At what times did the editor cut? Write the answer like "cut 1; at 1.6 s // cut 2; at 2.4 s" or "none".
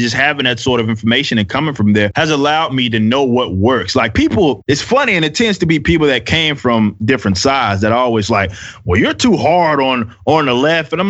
cut 1; at 2.1 s // cut 2; at 4.6 s